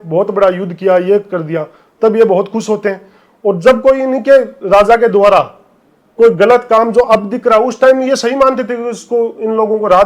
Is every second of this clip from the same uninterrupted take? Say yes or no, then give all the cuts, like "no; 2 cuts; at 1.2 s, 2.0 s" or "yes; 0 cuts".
yes; 0 cuts